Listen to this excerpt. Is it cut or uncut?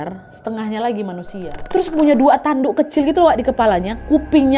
cut